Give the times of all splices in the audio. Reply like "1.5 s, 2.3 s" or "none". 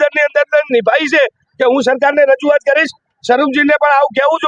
none